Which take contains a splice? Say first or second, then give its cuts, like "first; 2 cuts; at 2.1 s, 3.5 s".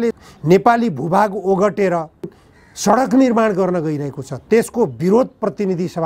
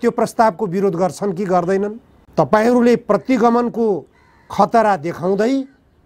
second; 1 cut; at 2.2 s